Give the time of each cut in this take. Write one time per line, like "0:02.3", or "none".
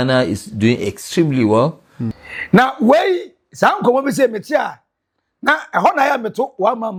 none